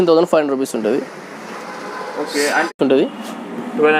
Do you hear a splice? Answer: yes; 1 cut; at 2.7 s

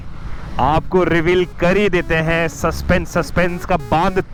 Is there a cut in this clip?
no; 0 cuts

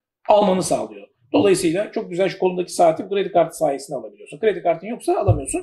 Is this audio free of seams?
yes; 0 cuts

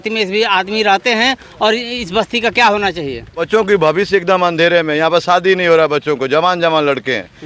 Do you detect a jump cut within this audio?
yes; 1 cut; at 3.3 s

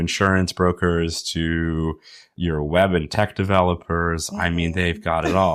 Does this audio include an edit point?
no; 0 cuts

